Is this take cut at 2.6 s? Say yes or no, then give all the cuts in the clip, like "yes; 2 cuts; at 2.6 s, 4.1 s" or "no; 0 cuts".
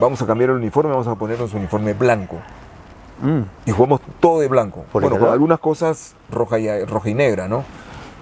no; 0 cuts